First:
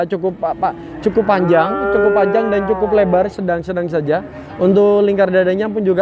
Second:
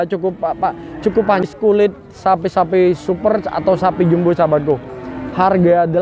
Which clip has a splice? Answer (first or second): second